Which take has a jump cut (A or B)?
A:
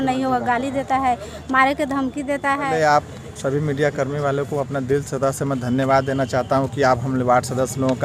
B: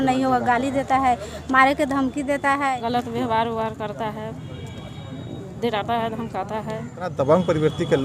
B